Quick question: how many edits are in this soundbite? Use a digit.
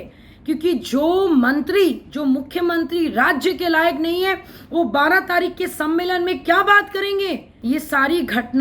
1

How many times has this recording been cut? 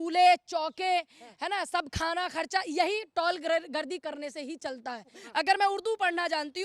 1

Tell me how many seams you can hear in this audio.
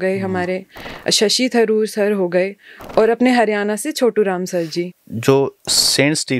1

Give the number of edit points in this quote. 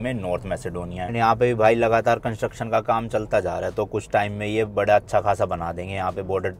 0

